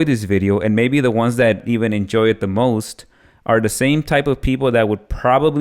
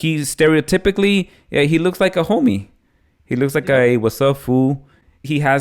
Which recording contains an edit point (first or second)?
first